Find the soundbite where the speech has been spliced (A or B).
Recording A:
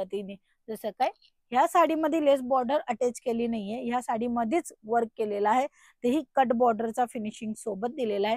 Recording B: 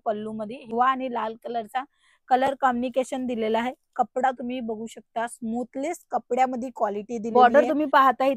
B